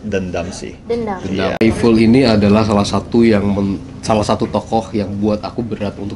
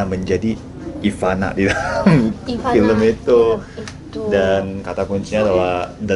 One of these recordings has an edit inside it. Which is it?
first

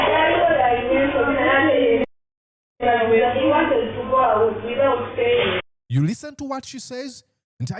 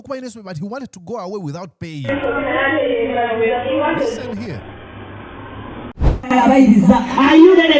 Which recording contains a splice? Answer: second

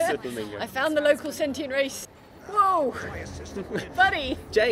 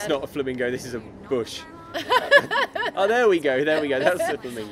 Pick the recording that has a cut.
first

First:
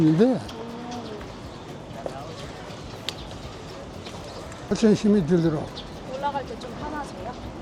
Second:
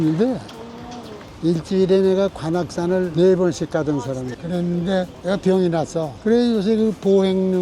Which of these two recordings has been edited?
second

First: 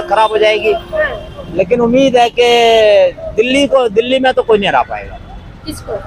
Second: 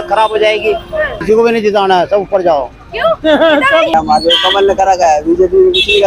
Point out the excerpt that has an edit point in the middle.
second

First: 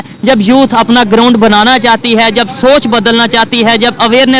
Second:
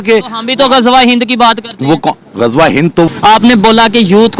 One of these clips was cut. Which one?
second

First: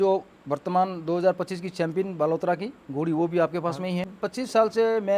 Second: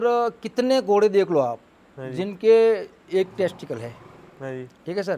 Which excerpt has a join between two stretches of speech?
first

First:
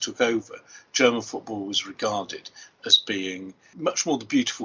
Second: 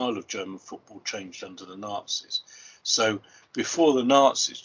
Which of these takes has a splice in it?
first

